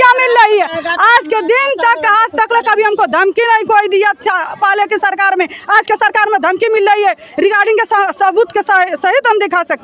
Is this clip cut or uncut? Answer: uncut